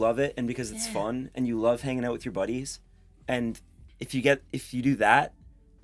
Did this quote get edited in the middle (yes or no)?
no